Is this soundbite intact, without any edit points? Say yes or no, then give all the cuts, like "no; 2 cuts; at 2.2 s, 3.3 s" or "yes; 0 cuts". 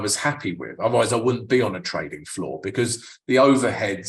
yes; 0 cuts